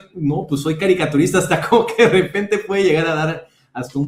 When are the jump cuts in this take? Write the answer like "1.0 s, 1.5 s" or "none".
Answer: none